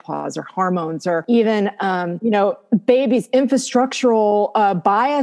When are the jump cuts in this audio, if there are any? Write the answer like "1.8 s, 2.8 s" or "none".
1.2 s, 2.1 s

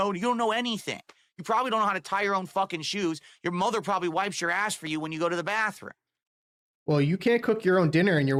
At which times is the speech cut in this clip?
none

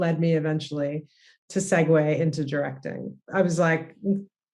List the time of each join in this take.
3.3 s

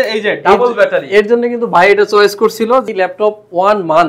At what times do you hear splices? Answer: 2.9 s

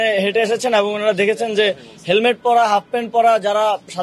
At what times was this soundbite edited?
none

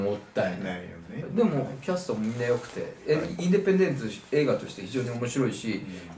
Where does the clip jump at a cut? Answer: 1.2 s

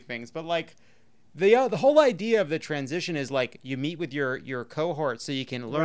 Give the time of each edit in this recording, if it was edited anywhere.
none

